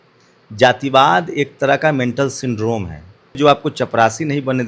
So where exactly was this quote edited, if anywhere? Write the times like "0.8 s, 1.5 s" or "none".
3.4 s